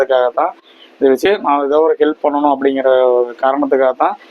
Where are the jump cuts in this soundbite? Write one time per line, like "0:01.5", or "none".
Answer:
0:01.3